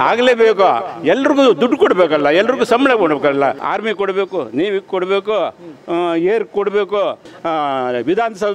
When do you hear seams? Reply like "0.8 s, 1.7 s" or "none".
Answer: 3.6 s, 7.3 s